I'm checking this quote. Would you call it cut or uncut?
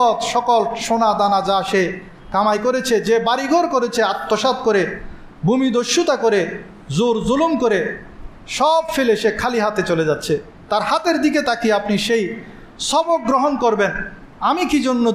uncut